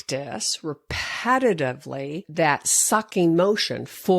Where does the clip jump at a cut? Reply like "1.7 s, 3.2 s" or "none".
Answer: 2.2 s